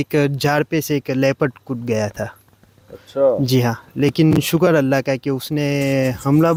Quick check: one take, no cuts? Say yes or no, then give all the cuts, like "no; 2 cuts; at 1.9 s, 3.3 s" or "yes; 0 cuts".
yes; 0 cuts